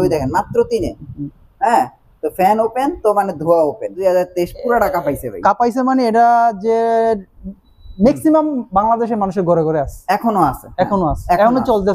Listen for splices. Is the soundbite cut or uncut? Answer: cut